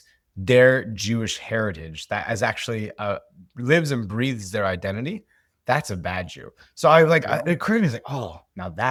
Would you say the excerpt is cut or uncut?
uncut